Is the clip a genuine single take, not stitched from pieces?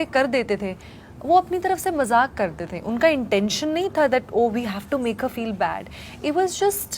yes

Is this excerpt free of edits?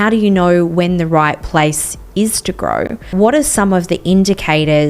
no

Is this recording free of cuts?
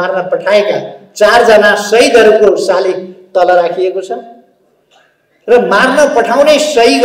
yes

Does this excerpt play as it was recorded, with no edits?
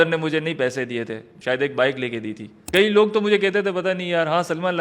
no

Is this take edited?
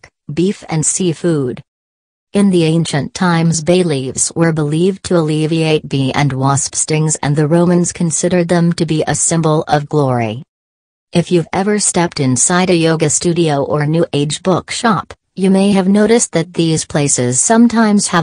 yes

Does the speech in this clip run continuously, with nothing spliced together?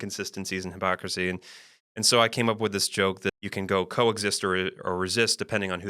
no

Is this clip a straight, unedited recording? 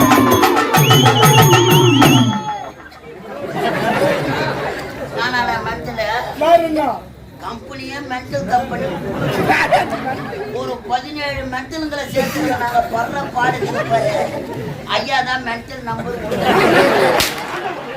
no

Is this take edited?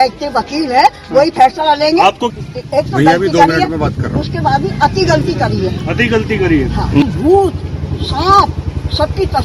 yes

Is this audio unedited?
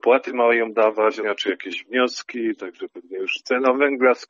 no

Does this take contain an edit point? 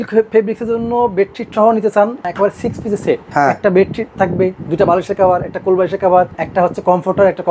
yes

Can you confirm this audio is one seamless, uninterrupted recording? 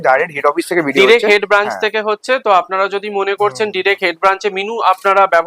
yes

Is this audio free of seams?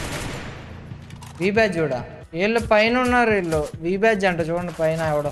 no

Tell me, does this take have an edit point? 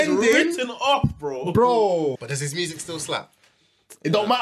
yes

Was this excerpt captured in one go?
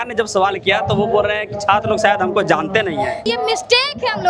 no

